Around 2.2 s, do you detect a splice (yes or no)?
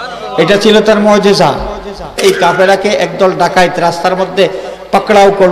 yes